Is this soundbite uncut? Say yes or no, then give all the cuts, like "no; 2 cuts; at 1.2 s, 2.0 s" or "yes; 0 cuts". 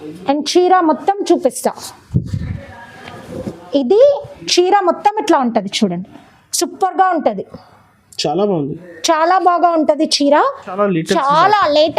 no; 1 cut; at 10.7 s